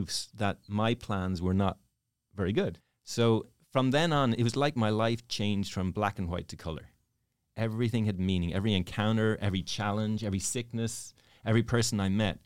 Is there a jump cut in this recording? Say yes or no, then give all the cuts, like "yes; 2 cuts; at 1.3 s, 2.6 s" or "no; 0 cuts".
yes; 1 cut; at 2.8 s